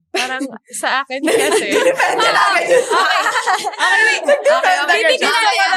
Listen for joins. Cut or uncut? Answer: uncut